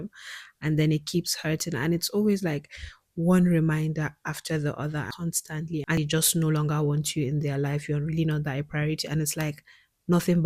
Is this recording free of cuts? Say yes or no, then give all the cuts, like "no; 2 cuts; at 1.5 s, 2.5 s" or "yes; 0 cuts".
no; 1 cut; at 6.0 s